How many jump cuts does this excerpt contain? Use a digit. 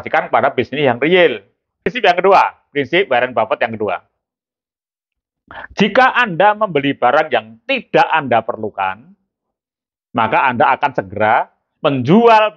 1